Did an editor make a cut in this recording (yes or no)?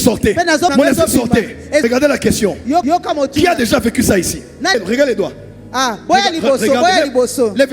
yes